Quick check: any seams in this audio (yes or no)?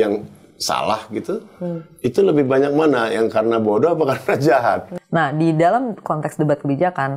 yes